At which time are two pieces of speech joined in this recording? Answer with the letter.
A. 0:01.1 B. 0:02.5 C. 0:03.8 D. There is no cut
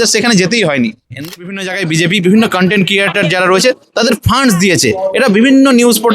A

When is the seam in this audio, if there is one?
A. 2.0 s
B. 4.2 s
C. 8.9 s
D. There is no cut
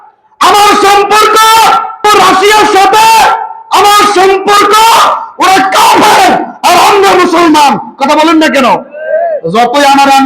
A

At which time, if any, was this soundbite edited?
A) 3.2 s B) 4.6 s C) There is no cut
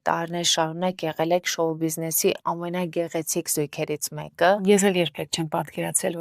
B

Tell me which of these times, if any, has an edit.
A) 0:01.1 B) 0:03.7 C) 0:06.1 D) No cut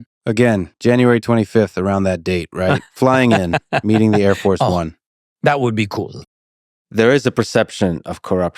C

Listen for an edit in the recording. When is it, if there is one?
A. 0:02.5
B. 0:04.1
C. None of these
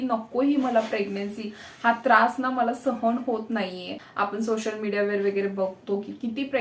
B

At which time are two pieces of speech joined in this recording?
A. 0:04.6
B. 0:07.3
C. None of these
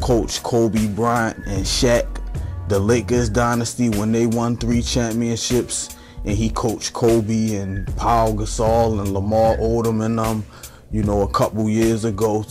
A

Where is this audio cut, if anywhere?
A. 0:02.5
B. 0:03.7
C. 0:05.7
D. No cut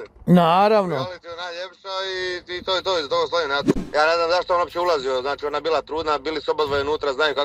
B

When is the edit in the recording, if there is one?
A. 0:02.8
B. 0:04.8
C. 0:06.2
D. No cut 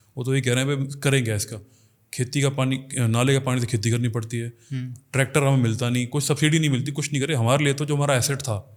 D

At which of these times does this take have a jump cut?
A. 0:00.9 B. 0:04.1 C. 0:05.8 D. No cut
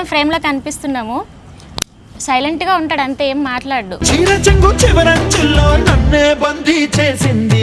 D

